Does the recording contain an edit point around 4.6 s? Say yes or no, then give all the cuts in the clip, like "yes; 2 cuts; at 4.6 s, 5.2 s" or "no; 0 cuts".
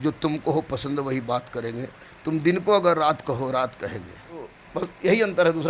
yes; 1 cut; at 4.6 s